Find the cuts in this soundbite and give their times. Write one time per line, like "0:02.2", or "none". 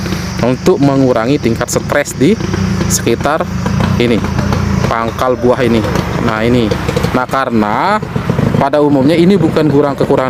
none